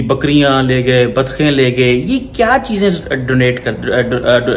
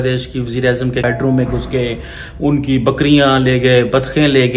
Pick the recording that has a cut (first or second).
second